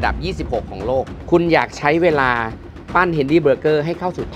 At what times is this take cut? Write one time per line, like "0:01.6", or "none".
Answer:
0:01.1